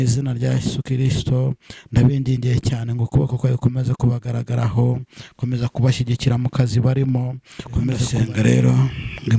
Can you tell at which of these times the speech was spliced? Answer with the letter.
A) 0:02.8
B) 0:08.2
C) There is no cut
B